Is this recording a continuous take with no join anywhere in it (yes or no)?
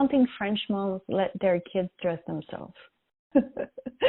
no